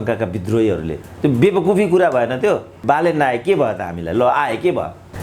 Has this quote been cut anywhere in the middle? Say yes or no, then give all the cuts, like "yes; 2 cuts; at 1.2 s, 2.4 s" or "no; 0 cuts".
yes; 1 cut; at 2.8 s